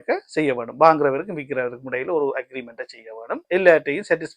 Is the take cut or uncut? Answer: cut